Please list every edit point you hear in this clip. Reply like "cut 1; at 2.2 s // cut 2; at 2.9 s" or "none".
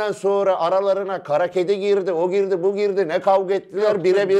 none